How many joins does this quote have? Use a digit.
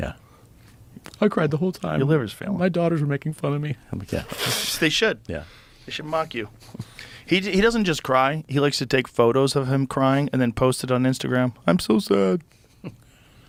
0